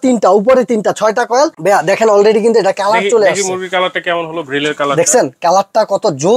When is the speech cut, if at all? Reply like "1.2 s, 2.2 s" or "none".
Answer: 1.6 s